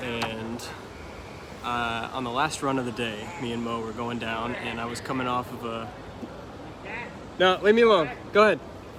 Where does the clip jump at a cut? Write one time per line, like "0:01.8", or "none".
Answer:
none